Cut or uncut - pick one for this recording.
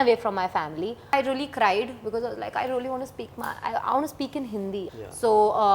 cut